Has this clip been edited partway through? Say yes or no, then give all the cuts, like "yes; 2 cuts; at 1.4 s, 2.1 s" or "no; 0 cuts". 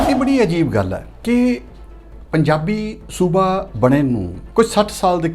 yes; 2 cuts; at 1.1 s, 4.4 s